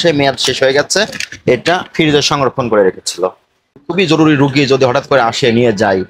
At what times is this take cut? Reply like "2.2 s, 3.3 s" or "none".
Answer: 3.8 s